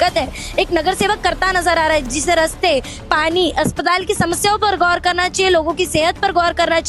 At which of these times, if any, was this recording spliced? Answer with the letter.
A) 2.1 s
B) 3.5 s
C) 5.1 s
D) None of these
A